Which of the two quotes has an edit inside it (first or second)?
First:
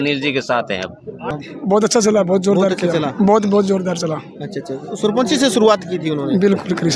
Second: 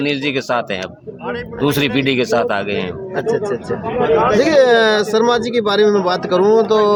first